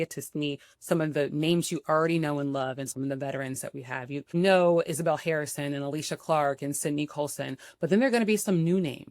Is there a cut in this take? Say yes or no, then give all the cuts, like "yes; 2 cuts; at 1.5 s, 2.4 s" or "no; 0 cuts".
yes; 1 cut; at 4.3 s